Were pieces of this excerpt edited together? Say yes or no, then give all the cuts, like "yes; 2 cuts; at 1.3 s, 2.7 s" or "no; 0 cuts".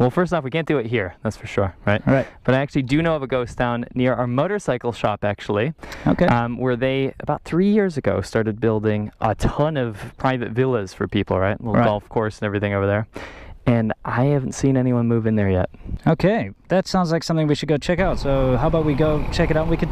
no; 0 cuts